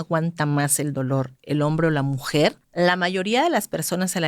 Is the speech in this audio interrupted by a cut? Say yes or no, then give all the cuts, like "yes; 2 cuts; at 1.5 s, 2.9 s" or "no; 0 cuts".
yes; 1 cut; at 2.6 s